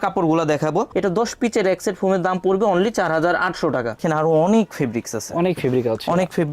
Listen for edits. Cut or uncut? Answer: cut